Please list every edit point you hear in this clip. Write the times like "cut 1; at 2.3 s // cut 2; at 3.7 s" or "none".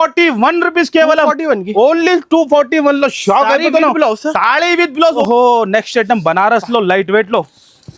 cut 1; at 5.2 s